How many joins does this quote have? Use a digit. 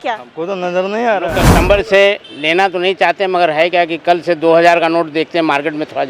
1